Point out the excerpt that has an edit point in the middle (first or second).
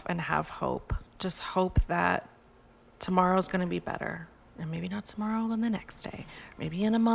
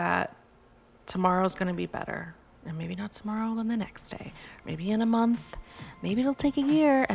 first